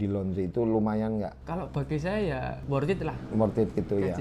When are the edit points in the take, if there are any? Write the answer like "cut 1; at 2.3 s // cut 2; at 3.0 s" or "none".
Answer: cut 1; at 1.4 s // cut 2; at 2.6 s